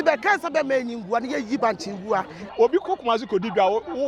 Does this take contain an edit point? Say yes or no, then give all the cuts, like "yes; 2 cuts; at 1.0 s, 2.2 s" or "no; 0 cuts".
yes; 1 cut; at 2.4 s